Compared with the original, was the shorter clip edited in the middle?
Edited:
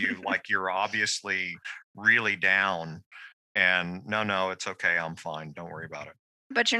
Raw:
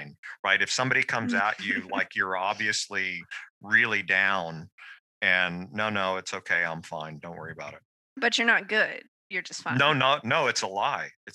no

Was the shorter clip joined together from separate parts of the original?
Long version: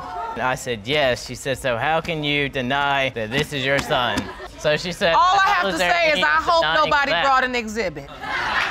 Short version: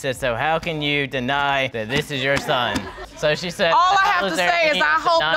no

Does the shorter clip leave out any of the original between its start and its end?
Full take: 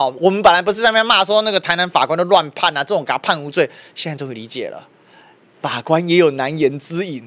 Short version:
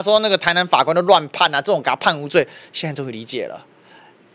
no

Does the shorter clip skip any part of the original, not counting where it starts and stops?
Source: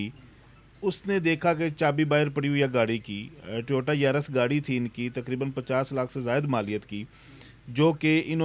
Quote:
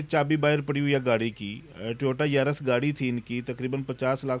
no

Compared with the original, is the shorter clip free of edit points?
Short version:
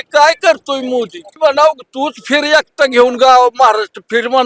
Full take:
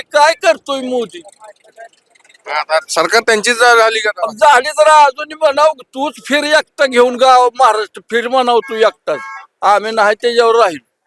no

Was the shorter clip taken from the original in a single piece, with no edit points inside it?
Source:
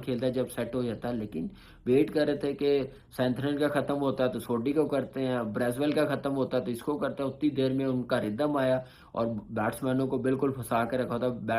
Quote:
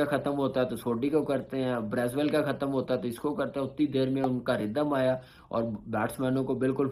yes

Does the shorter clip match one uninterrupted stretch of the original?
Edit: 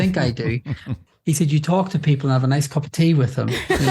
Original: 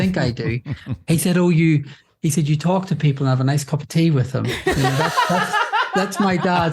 no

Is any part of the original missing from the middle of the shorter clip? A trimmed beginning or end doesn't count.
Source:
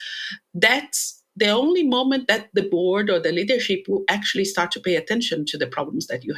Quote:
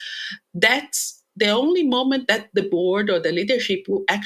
no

